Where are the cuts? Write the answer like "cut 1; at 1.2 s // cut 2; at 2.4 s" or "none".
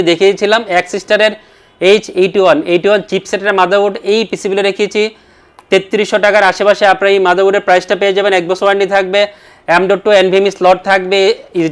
none